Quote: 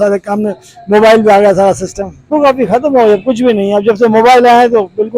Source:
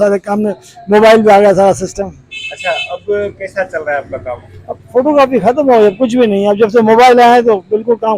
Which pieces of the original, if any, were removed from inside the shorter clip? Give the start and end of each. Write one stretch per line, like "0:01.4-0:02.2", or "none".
0:02.3-0:05.0